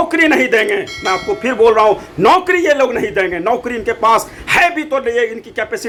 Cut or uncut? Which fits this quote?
uncut